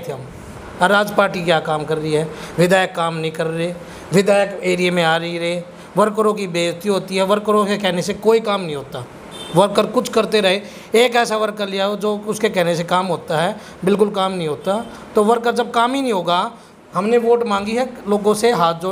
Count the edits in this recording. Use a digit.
0